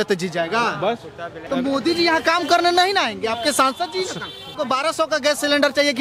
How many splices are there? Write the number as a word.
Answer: two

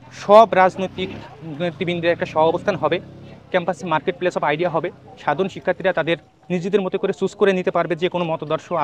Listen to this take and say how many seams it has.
zero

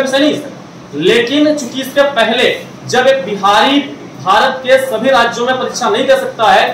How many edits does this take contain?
zero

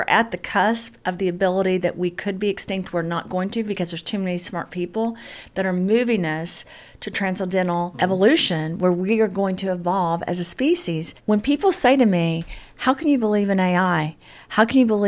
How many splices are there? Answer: two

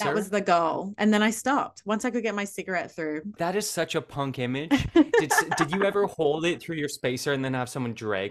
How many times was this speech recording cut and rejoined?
one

